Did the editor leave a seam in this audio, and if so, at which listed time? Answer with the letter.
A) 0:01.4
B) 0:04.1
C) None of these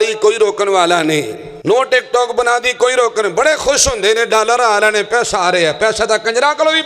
A